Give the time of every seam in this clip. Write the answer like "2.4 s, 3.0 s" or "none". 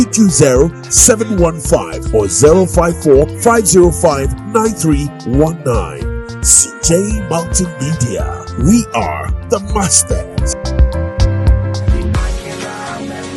none